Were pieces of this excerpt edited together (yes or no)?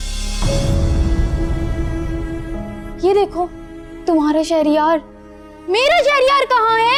no